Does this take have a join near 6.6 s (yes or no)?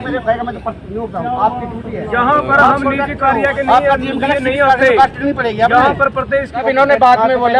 yes